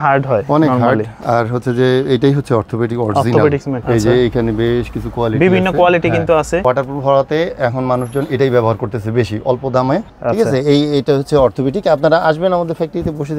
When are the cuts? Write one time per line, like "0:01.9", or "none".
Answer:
0:03.7
0:06.6
0:10.1

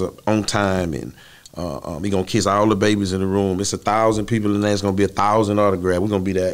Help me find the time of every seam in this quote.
none

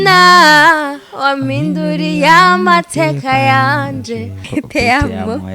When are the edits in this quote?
0:04.4

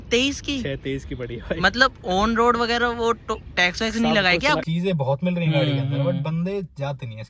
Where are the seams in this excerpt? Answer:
0:04.6

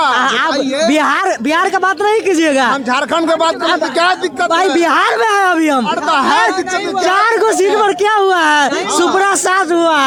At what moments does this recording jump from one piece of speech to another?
none

